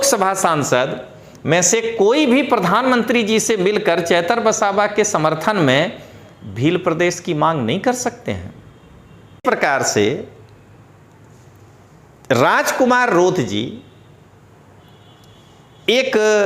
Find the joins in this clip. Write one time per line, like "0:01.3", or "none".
0:09.4